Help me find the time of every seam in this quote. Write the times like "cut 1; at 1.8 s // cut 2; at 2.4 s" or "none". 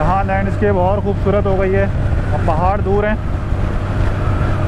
none

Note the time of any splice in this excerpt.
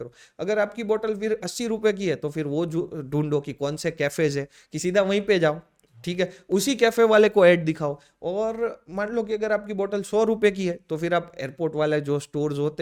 none

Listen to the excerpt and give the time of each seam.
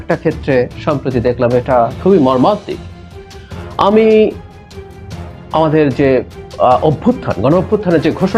none

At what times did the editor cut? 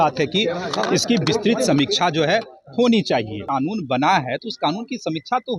cut 1; at 3.4 s

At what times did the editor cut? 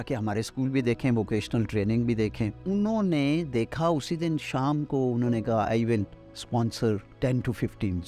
cut 1; at 2.6 s // cut 2; at 7.1 s

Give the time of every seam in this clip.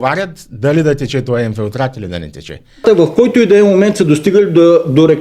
cut 1; at 2.8 s

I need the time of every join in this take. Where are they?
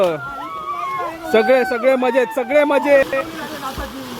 cut 1; at 3.0 s

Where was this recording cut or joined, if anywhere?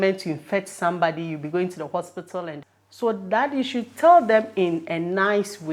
cut 1; at 2.6 s

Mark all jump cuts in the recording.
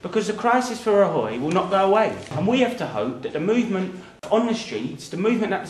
cut 1; at 2.3 s // cut 2; at 4.2 s

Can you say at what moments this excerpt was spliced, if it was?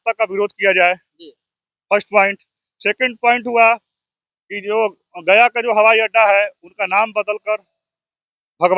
none

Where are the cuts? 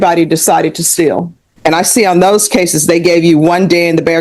cut 1; at 1.5 s

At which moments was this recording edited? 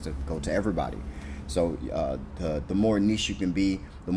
none

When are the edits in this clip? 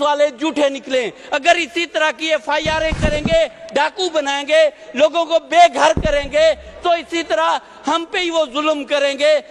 none

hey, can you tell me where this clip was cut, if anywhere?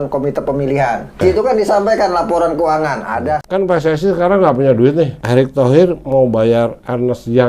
cut 1; at 1.2 s // cut 2; at 3.4 s // cut 3; at 5.2 s

